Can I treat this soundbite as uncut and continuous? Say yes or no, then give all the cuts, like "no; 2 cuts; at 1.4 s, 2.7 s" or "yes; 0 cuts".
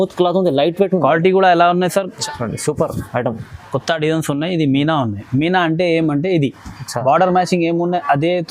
no; 1 cut; at 2.2 s